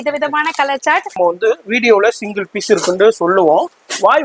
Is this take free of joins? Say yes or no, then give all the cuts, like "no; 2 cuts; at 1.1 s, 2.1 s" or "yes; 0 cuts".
no; 1 cut; at 1.2 s